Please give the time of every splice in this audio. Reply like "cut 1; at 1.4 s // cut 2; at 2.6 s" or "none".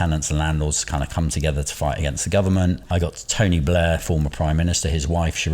cut 1; at 2.9 s